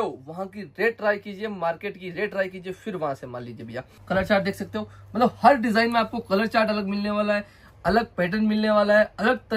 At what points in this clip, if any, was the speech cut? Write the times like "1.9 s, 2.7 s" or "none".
3.9 s